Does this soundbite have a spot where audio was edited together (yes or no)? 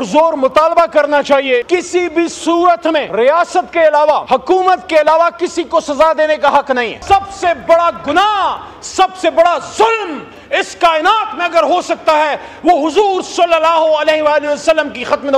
yes